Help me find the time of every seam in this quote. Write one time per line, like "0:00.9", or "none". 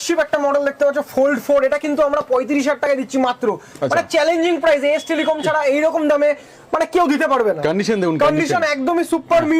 none